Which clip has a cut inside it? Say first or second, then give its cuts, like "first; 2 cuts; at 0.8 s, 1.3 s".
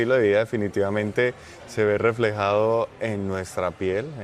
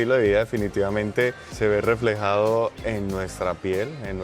second; 1 cut; at 1.4 s